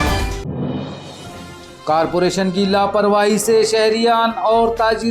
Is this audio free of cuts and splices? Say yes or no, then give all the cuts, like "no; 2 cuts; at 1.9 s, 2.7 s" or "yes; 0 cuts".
no; 1 cut; at 1.5 s